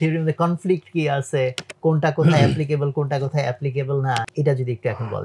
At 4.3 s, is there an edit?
yes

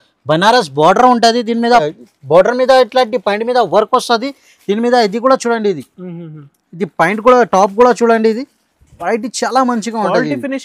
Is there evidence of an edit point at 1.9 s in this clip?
yes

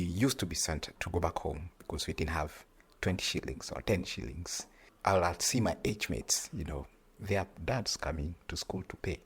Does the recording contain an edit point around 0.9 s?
yes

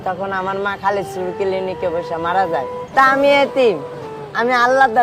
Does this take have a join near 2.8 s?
yes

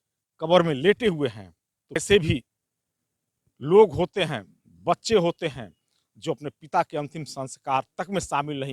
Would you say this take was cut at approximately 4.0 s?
no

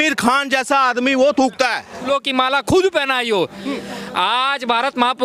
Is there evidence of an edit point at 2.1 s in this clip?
yes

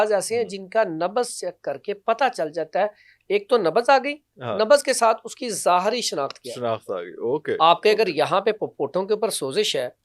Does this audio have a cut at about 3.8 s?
no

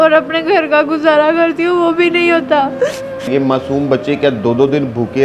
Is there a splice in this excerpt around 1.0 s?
no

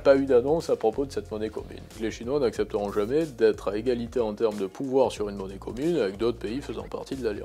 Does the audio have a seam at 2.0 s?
yes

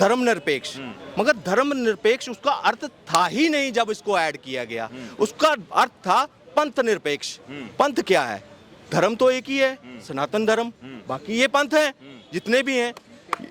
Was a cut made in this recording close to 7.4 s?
no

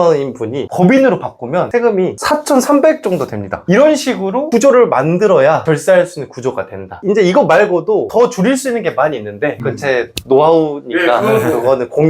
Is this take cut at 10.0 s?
no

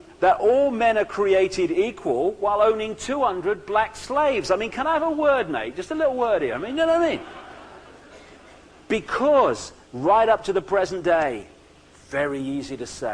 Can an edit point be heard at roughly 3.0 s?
no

